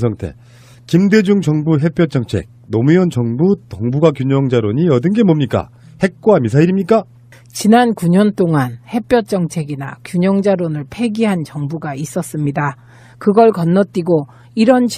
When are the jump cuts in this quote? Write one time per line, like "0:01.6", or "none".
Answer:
none